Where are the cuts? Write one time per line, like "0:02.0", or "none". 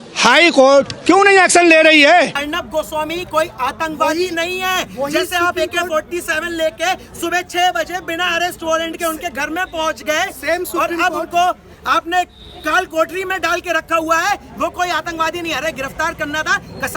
0:02.4